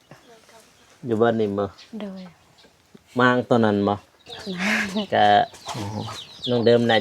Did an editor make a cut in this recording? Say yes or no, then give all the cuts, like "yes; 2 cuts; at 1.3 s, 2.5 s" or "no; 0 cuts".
yes; 1 cut; at 5.1 s